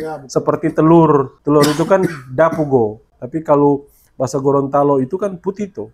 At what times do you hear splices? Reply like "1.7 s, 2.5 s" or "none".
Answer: 1.3 s, 3.1 s